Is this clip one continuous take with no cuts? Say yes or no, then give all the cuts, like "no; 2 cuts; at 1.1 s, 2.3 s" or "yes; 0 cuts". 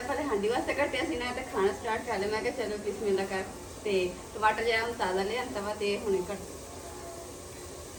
yes; 0 cuts